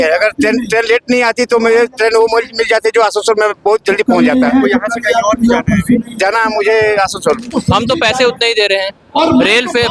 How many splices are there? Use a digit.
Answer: 1